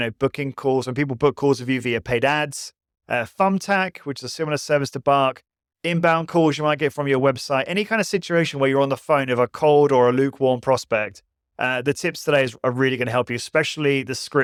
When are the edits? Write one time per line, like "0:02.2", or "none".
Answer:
none